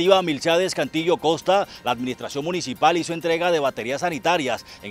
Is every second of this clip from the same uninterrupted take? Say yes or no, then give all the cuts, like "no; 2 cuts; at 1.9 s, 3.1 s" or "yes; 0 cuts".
yes; 0 cuts